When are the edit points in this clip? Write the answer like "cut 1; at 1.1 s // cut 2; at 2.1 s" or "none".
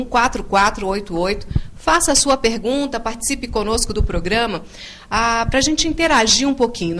cut 1; at 1.9 s